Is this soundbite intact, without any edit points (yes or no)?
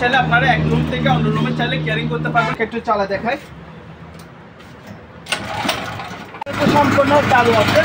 no